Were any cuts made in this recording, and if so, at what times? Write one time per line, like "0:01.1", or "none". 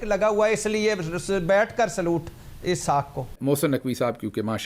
0:03.3